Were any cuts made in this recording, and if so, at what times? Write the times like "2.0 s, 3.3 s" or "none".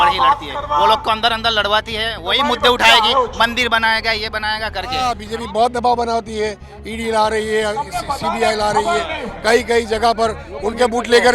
5.0 s